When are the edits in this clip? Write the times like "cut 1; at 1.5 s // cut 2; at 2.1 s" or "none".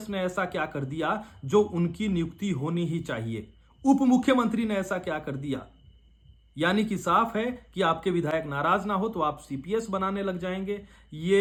none